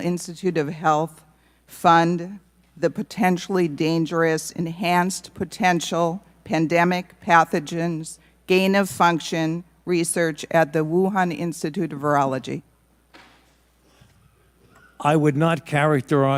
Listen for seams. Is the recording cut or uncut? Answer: uncut